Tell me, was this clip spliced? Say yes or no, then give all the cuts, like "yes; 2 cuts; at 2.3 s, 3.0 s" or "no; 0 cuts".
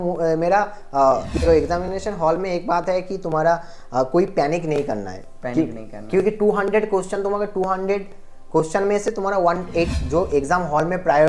yes; 2 cuts; at 1.5 s, 9.9 s